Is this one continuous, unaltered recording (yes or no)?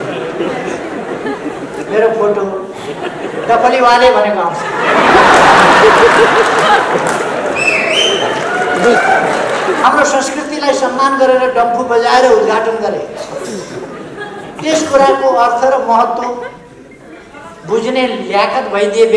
no